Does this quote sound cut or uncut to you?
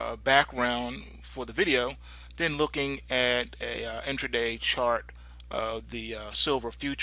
uncut